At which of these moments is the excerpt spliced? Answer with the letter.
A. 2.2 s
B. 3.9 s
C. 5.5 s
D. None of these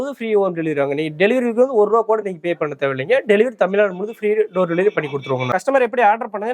C